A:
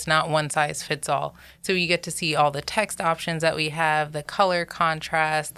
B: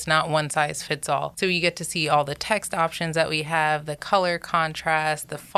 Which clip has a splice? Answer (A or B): B